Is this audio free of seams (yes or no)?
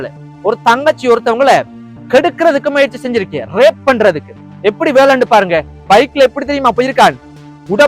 no